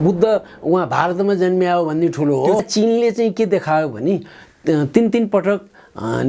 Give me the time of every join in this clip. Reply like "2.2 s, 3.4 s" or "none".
2.6 s